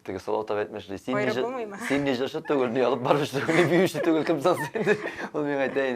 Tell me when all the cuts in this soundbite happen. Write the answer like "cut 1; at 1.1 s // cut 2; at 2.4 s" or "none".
none